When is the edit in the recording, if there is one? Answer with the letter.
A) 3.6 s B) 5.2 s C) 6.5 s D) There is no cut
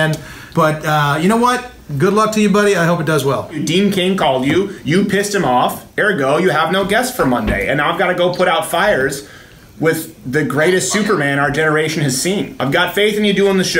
A